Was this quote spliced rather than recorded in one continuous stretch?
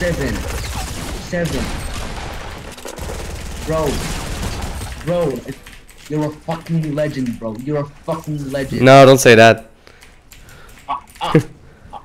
no; 0 cuts

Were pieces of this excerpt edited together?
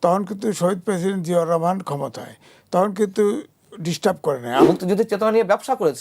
yes; 1 cut; at 4.6 s

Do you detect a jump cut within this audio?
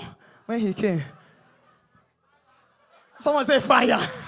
no; 0 cuts

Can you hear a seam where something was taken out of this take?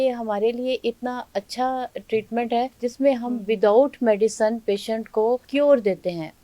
yes; 2 cuts; at 2.7 s, 5.5 s

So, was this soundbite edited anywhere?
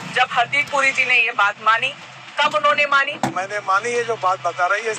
yes; 1 cut; at 3.2 s

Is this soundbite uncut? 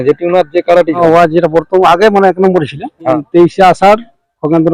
no; 2 cuts; at 1.0 s, 3.2 s

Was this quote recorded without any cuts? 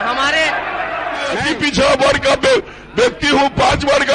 no; 1 cut; at 1.5 s

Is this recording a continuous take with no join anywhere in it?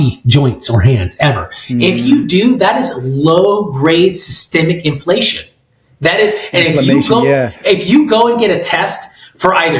yes; 0 cuts

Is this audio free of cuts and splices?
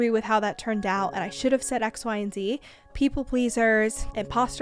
no; 1 cut; at 2.9 s

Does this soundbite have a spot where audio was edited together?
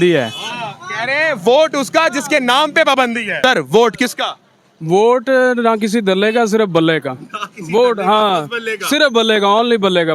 yes; 1 cut; at 3.3 s

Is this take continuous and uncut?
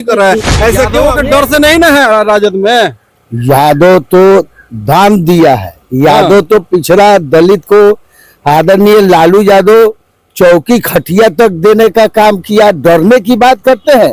no; 1 cut; at 1.0 s

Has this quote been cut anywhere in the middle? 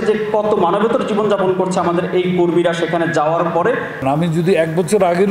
yes; 1 cut; at 4.1 s

